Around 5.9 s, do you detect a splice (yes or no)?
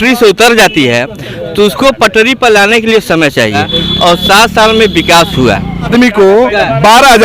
yes